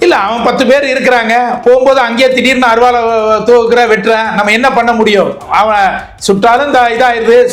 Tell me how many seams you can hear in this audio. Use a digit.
0